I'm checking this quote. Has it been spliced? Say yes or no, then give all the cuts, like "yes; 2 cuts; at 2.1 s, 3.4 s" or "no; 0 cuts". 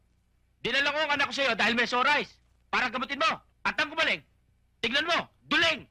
yes; 1 cut; at 3.5 s